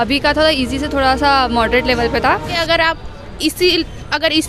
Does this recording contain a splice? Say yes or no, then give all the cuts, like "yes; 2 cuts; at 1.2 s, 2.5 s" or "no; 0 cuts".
yes; 1 cut; at 2.5 s